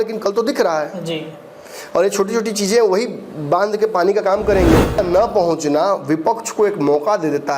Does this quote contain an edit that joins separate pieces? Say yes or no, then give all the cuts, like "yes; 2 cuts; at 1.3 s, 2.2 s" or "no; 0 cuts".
yes; 1 cut; at 5.0 s